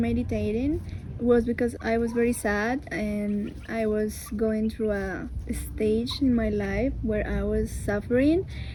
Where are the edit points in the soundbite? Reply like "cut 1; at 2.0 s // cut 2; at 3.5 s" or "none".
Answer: none